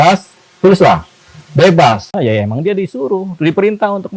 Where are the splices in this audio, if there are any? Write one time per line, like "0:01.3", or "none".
0:02.1